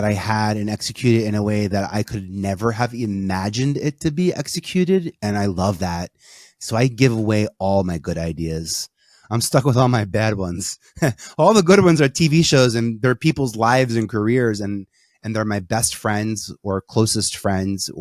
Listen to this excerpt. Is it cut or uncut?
uncut